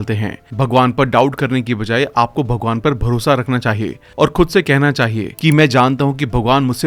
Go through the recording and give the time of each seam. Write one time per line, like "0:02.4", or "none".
none